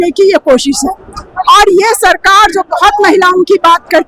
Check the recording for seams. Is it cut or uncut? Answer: uncut